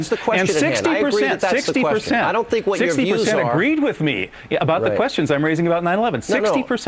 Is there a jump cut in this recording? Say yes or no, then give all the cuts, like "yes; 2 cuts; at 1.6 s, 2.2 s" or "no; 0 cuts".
no; 0 cuts